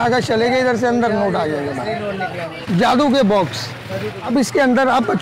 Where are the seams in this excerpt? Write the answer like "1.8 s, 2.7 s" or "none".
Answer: 2.5 s, 4.2 s